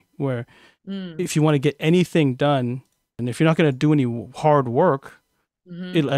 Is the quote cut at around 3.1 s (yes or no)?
yes